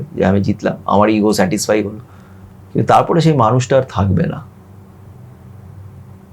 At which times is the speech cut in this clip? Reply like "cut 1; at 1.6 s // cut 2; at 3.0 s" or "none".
none